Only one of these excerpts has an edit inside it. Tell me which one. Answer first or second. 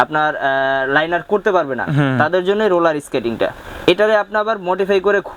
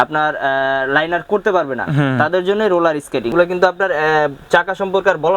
second